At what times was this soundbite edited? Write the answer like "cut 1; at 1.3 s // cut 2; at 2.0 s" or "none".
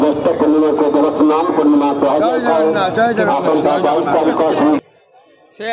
cut 1; at 4.8 s